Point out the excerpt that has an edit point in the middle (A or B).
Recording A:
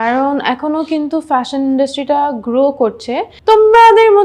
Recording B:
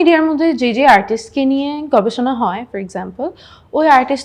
A